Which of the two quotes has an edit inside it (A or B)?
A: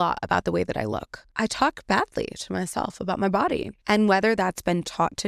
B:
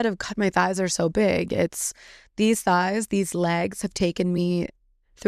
A